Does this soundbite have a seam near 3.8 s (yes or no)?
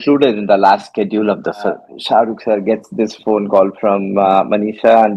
no